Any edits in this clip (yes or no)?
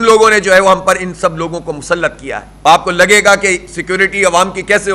yes